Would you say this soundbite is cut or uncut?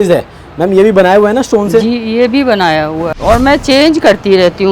cut